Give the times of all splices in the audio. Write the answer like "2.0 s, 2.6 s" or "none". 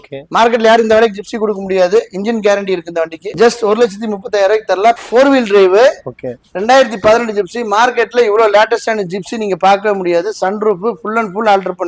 3.3 s, 5.0 s